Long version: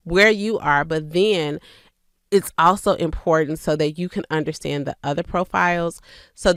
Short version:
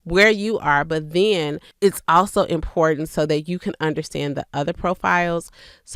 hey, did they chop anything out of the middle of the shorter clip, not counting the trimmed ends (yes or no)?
yes